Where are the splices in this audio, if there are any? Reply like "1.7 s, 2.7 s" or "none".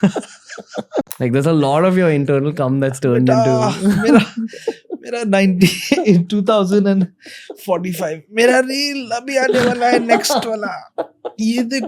1.1 s

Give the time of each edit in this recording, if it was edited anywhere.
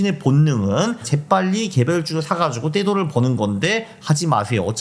none

